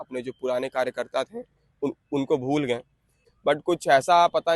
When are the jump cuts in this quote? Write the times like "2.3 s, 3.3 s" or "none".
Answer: 2.9 s